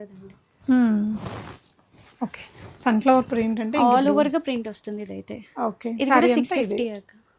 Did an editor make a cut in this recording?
no; 0 cuts

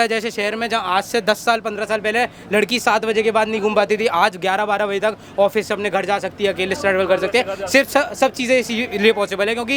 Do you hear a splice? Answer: no; 0 cuts

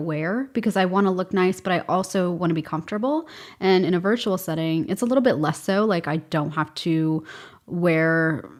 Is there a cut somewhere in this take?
no; 0 cuts

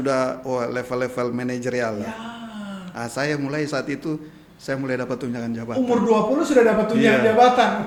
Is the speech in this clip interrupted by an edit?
no; 0 cuts

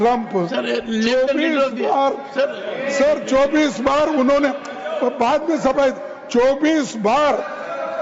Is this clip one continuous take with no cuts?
yes; 0 cuts

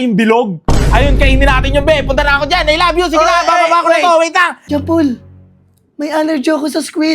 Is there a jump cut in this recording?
yes; 1 cut; at 4.6 s

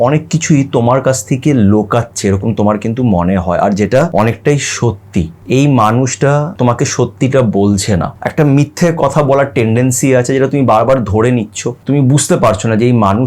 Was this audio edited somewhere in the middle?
yes; 5 cuts; at 4.1 s, 5.4 s, 6.5 s, 8.2 s, 11.8 s

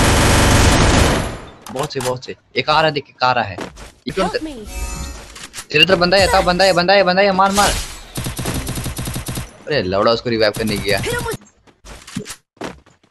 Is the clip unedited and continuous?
no; 2 cuts; at 4.1 s, 11.4 s

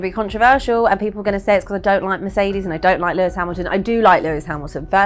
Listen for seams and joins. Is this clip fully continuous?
yes; 0 cuts

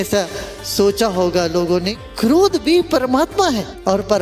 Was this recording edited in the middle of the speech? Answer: no; 0 cuts

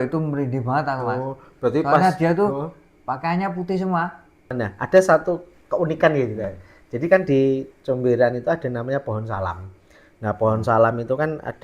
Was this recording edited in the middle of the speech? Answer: yes; 1 cut; at 4.5 s

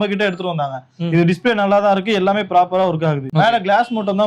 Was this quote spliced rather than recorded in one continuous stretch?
yes; 1 cut; at 3.2 s

